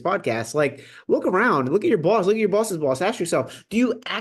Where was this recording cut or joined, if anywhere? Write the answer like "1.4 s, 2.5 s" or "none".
none